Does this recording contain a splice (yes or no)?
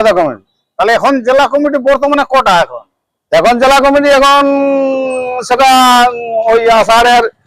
no